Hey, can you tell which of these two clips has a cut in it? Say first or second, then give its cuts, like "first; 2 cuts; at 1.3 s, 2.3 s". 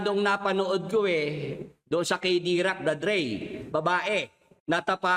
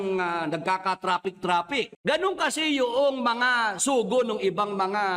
second; 1 cut; at 1.9 s